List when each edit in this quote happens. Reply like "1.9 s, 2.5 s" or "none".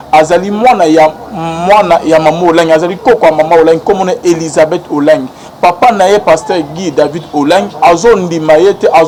none